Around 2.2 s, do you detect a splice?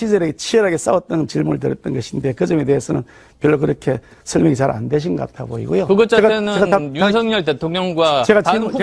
no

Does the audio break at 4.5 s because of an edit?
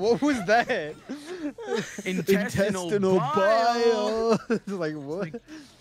no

